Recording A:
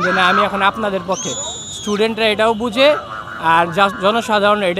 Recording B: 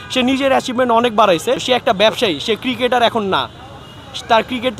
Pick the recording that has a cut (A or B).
B